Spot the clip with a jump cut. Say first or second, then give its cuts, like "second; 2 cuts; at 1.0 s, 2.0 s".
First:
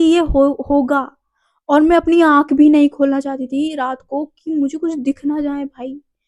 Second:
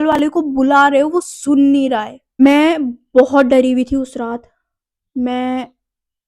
second; 1 cut; at 2.4 s